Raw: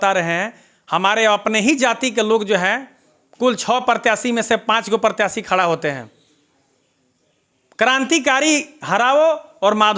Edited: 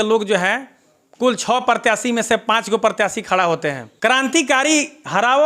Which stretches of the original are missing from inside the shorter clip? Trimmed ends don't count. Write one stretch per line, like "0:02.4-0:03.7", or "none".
0:06.1-0:07.6